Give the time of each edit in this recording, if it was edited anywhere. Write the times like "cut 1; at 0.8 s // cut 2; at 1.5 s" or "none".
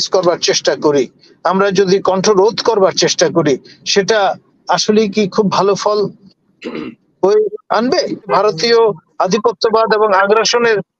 cut 1; at 8.3 s